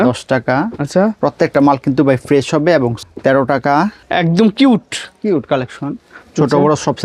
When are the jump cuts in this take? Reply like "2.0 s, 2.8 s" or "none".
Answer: 3.1 s, 4.0 s